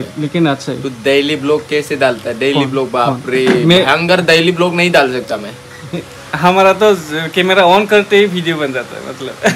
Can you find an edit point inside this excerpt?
no; 0 cuts

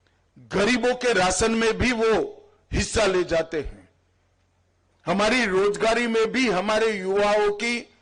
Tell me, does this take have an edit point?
no; 0 cuts

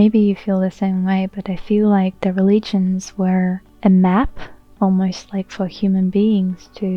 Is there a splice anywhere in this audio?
yes; 1 cut; at 3.7 s

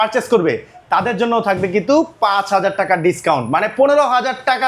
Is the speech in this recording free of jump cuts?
yes; 0 cuts

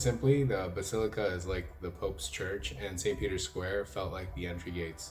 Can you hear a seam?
no; 0 cuts

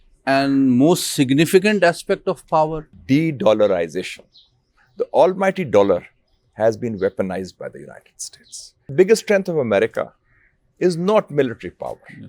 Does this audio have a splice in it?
yes; 2 cuts; at 2.9 s, 8.9 s

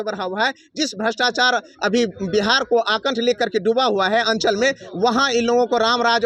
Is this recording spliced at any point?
no; 0 cuts

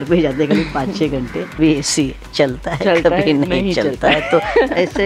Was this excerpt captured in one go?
no; 1 cut; at 1.6 s

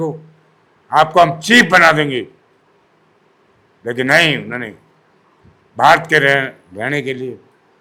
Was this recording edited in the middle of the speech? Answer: no; 0 cuts

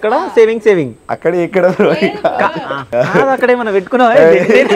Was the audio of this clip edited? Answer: yes; 1 cut; at 2.9 s

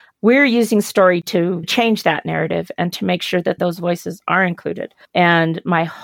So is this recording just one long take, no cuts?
no; 3 cuts; at 1.7 s, 3.6 s, 4.9 s

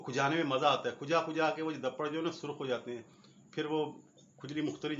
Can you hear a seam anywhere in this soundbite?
no; 0 cuts

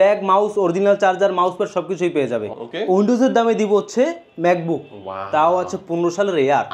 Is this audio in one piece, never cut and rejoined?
no; 1 cut; at 2.5 s

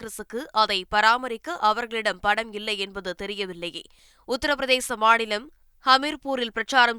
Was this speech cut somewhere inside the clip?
no; 0 cuts

